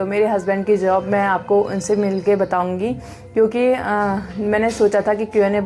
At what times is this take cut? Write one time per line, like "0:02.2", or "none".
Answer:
none